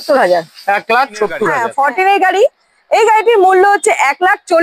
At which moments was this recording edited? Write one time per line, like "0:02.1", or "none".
0:01.6